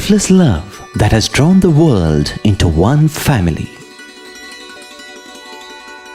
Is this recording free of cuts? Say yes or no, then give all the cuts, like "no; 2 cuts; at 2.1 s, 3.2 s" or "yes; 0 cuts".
no; 1 cut; at 3.7 s